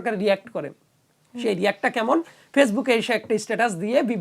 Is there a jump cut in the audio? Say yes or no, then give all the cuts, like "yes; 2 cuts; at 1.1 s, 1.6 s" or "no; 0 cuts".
no; 0 cuts